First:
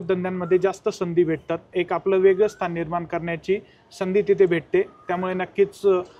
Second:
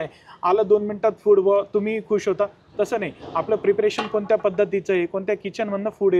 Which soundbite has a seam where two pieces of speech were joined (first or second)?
first